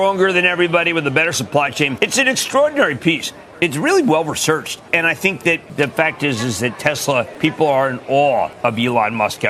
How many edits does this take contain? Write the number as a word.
four